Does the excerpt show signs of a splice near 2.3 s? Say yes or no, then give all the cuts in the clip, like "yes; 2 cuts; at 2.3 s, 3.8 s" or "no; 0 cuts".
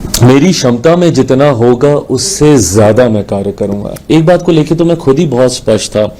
no; 1 cut; at 3.9 s